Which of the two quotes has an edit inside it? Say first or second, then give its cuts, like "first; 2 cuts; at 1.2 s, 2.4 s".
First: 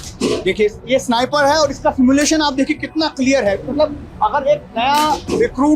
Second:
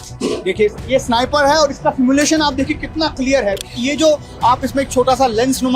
second; 1 cut; at 3.8 s